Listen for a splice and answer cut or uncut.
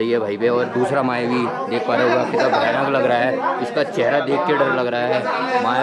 uncut